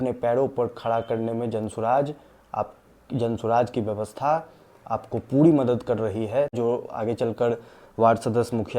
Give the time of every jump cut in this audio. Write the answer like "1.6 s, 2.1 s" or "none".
6.5 s